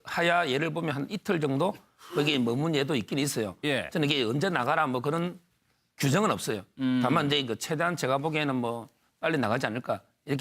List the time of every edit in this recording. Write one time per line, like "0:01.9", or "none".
0:08.4